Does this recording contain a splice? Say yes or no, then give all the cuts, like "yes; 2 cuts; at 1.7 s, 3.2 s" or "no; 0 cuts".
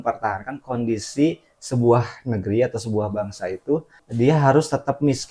yes; 1 cut; at 4.0 s